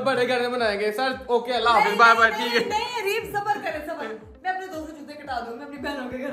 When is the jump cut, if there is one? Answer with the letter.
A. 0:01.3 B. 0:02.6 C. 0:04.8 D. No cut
D